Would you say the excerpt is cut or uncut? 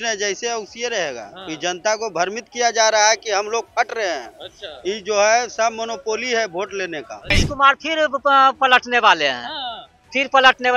cut